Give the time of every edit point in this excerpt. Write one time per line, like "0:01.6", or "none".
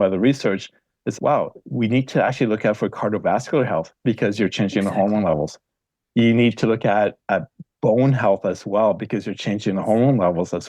0:01.1